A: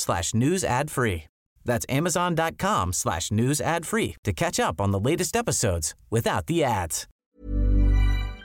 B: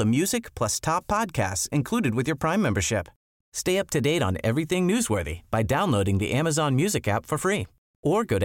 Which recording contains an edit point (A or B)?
A